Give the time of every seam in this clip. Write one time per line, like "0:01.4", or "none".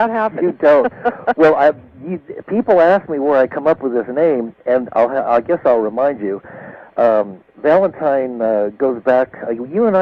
0:08.2

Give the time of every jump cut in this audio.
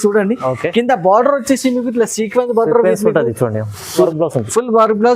0:03.9

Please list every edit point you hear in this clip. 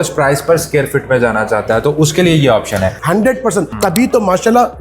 0:03.0
0:03.7

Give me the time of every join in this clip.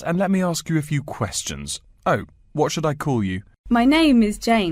0:03.5

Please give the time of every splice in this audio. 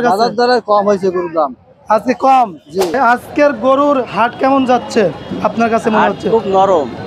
0:03.0

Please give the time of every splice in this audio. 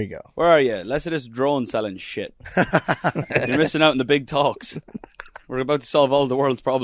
none

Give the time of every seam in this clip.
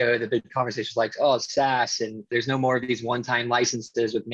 0:02.3

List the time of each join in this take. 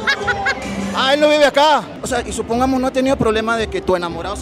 0:01.9

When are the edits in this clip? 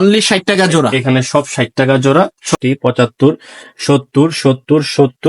0:02.5

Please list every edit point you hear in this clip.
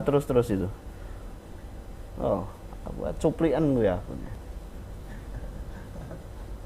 0:05.1

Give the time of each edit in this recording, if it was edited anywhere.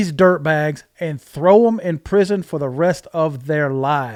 none

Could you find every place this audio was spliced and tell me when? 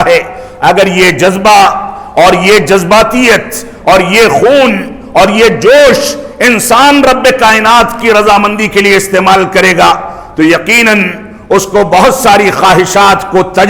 none

